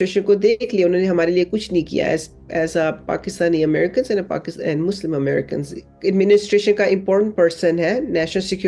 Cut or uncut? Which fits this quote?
cut